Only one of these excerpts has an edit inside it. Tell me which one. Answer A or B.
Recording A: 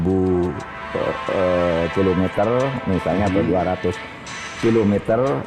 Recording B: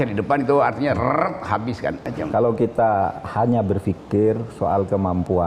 B